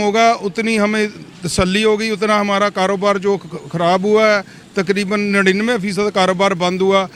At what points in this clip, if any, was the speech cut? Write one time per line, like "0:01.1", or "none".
none